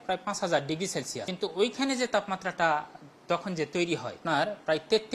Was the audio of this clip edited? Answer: yes; 2 cuts; at 1.3 s, 4.2 s

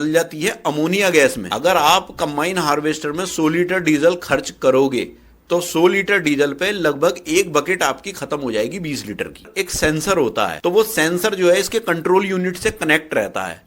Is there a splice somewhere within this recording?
yes; 2 cuts; at 1.5 s, 9.5 s

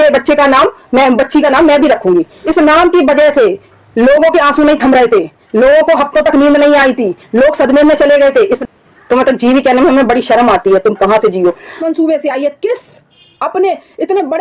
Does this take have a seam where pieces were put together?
yes; 3 cuts; at 2.4 s, 8.6 s, 11.8 s

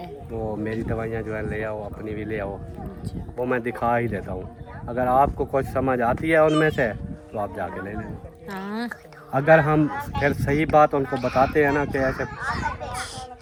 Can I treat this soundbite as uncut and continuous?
yes; 0 cuts

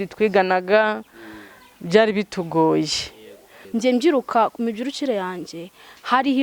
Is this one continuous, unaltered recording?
no; 1 cut; at 3.6 s

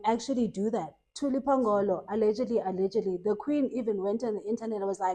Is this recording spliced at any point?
yes; 1 cut; at 1.0 s

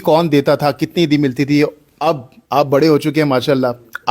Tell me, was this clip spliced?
yes; 1 cut; at 1.9 s

